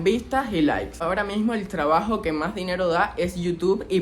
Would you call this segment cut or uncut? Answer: cut